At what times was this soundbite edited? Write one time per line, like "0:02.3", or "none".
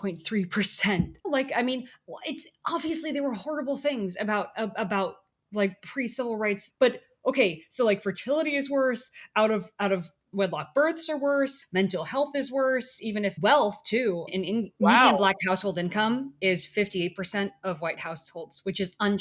0:01.2
0:06.7
0:11.6
0:13.3
0:14.3

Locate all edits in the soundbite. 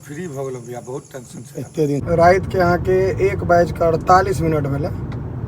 0:02.0

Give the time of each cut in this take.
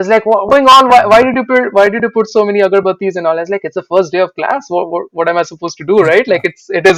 none

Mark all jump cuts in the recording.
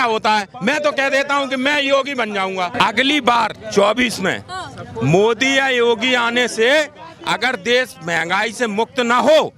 0:02.7

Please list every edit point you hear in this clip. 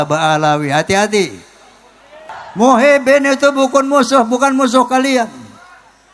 0:02.2

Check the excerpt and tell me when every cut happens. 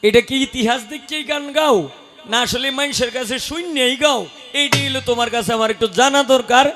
none

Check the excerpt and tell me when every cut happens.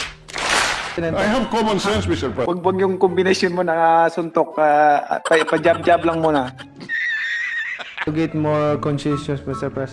0:02.4
0:06.6
0:08.0

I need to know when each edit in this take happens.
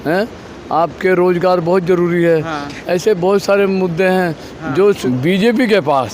0:05.0

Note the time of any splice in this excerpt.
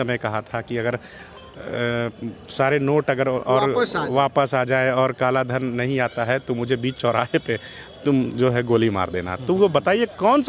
none

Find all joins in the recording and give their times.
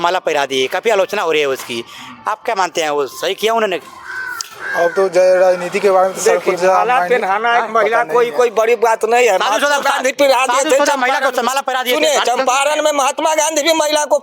none

